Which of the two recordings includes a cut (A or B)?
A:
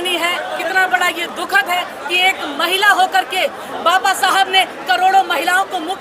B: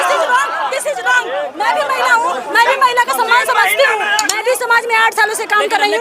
B